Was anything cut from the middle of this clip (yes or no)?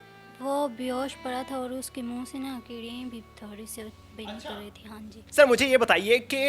yes